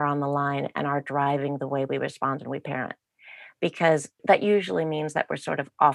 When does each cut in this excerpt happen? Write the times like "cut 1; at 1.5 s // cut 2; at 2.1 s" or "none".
cut 1; at 4.2 s